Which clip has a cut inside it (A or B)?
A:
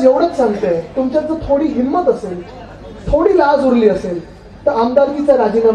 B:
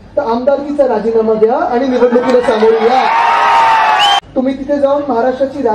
B